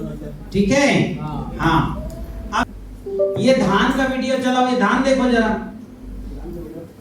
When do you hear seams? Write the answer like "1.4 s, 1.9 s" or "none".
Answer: 2.6 s

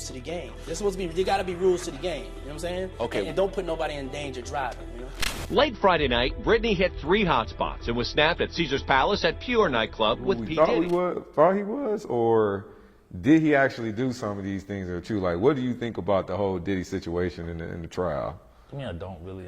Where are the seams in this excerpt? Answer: 10.5 s

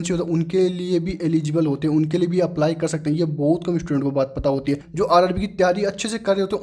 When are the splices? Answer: 4.9 s

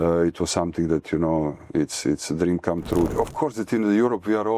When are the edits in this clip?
3.1 s

